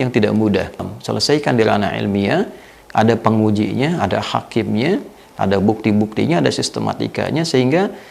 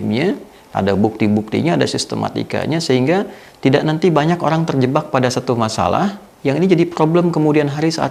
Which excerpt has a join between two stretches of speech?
first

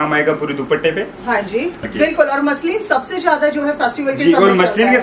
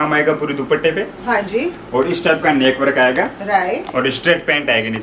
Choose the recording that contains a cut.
first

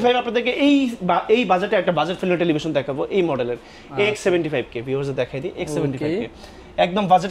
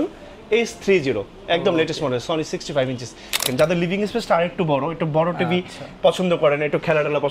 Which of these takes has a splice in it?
second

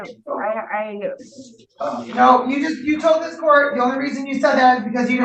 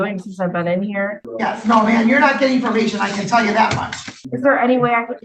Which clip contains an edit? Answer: second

